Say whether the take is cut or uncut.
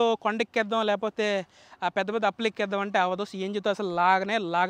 uncut